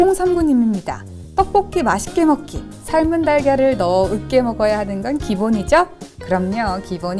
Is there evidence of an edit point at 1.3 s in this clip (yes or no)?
no